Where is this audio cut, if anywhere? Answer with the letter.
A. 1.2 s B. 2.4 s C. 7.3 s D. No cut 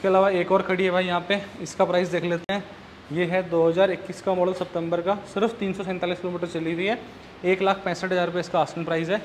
D